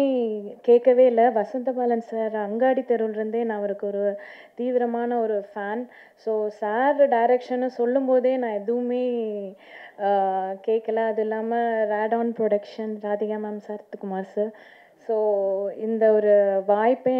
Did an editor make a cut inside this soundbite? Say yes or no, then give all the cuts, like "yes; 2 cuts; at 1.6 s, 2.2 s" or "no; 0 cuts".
no; 0 cuts